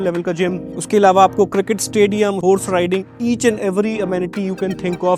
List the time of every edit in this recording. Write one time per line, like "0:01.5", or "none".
0:02.4